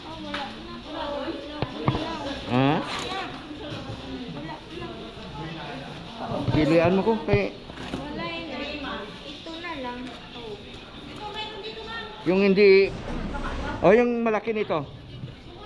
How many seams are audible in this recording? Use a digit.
1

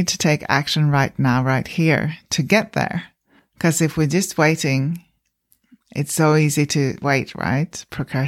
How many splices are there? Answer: 0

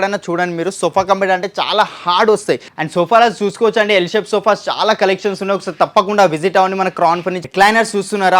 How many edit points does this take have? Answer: 2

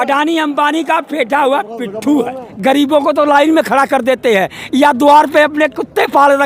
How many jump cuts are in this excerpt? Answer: 1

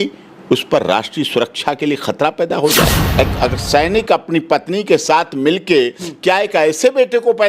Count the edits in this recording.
1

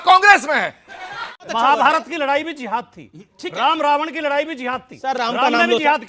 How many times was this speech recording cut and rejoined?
1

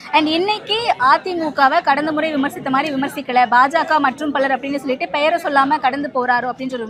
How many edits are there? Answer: 0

